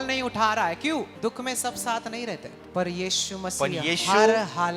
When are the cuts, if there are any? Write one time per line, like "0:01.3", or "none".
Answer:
0:01.1
0:02.6